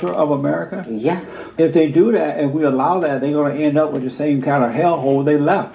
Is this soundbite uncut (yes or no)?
no